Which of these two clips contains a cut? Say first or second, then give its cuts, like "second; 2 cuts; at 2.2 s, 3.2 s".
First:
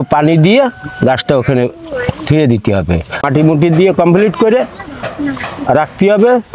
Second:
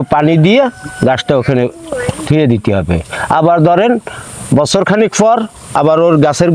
first; 1 cut; at 3.3 s